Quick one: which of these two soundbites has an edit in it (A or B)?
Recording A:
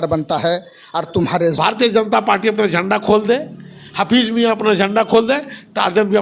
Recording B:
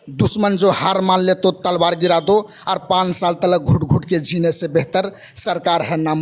A